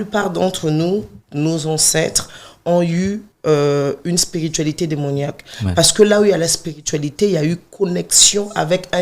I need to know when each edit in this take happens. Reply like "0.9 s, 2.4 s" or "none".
1.2 s, 3.3 s